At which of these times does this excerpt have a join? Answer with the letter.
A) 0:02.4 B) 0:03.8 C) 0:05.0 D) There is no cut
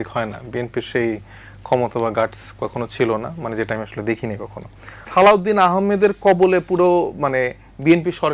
C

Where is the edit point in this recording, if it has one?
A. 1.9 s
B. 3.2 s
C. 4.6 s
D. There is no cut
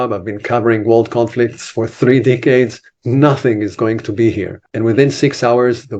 C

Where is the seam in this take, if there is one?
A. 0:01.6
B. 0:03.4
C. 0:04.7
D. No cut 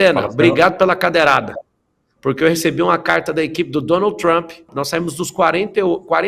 C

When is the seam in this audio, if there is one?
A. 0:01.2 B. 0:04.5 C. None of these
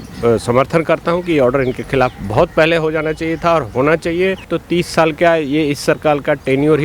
B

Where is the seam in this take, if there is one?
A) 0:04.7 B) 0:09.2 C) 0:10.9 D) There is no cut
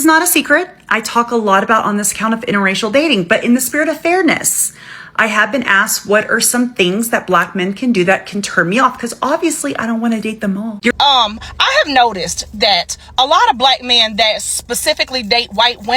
C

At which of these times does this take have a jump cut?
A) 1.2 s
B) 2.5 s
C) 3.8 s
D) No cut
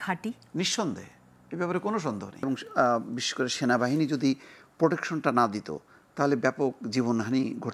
B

